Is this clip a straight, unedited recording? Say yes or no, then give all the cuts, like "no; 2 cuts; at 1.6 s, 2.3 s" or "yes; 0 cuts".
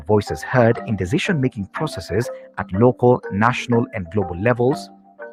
yes; 0 cuts